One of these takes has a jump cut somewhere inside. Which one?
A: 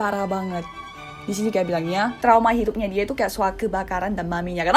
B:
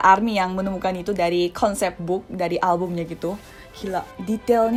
A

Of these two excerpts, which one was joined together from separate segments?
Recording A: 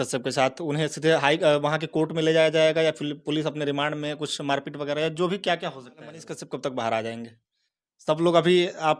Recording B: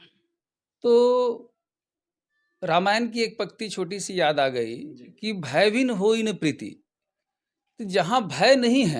A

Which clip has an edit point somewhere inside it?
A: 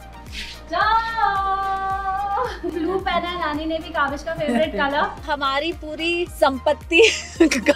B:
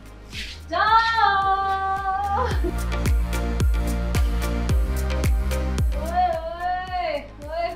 A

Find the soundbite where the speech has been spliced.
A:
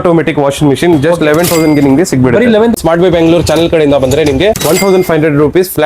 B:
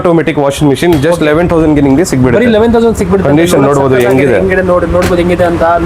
A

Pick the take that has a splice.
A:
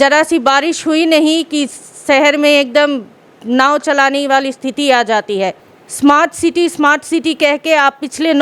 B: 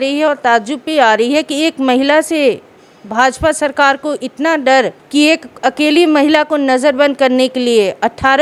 A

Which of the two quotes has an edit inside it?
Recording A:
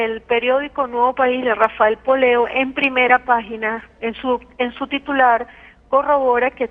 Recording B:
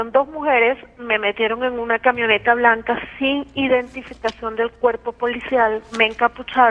A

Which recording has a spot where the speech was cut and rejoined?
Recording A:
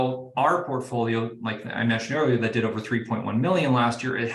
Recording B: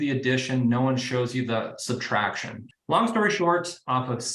B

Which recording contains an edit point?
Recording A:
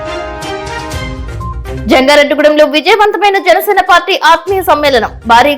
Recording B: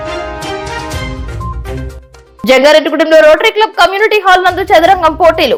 A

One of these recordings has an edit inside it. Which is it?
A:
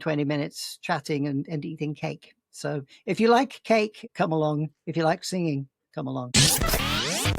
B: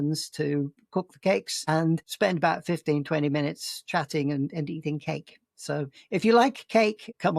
A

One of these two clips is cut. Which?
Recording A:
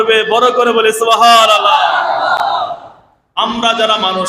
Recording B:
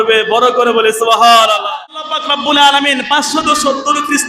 B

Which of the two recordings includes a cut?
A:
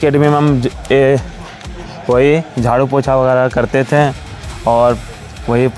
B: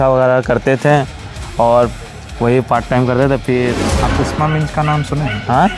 B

